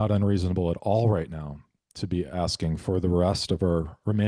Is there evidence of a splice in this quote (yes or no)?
no